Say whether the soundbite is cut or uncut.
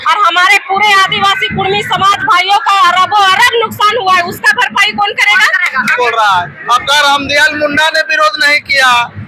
cut